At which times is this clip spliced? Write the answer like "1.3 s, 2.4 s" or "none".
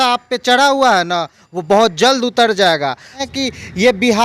3.3 s